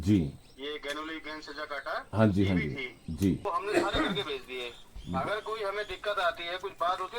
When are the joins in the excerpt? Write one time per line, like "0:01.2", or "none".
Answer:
0:03.4